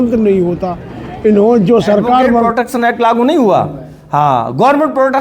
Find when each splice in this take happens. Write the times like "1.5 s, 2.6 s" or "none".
2.5 s